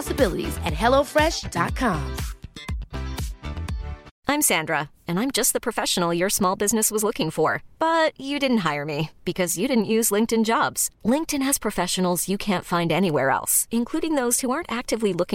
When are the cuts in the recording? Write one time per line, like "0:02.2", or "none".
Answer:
0:04.0